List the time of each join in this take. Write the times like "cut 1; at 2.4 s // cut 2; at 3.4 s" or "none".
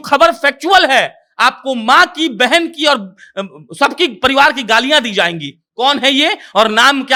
none